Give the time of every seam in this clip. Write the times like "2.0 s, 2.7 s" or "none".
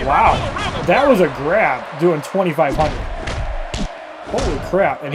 none